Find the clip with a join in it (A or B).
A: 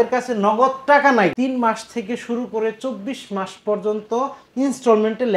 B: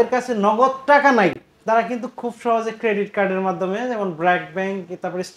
A